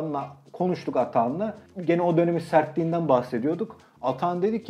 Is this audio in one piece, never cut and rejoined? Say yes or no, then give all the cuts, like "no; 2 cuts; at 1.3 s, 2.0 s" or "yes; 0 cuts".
no; 1 cut; at 1.7 s